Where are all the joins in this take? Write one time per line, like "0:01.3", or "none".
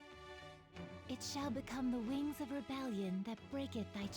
0:01.0